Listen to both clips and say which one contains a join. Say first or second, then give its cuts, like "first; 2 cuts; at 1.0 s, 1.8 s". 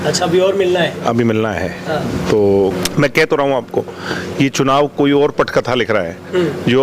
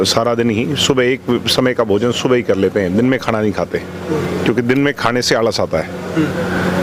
first; 1 cut; at 2.7 s